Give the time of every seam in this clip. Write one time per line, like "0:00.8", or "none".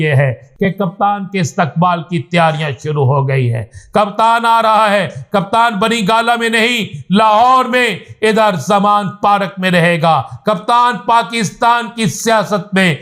none